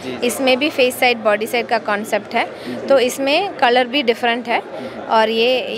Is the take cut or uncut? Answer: uncut